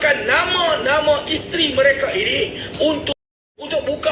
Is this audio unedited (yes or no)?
no